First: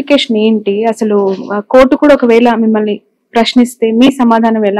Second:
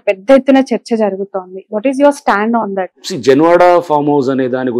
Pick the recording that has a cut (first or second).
second